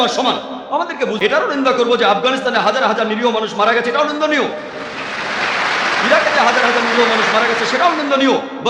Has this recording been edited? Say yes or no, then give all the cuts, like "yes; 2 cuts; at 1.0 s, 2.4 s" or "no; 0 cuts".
yes; 1 cut; at 1.1 s